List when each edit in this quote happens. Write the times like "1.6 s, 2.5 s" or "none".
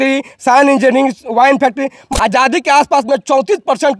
2.1 s